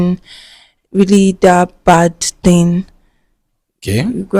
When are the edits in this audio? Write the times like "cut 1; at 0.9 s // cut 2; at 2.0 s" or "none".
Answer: none